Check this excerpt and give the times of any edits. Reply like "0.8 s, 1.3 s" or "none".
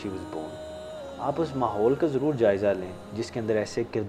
none